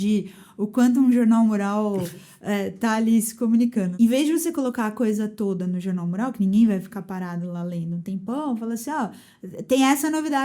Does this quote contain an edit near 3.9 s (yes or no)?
yes